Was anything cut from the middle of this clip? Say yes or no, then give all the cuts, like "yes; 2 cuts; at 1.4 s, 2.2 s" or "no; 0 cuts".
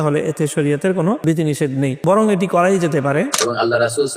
yes; 2 cuts; at 1.6 s, 3.4 s